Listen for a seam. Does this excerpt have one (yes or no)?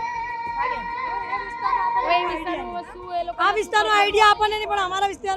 no